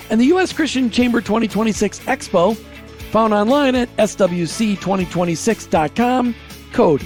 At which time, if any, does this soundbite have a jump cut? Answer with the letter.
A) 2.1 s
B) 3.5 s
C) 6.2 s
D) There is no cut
D